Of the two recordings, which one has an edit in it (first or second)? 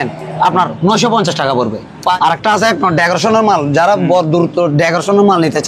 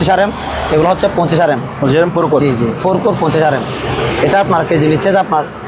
first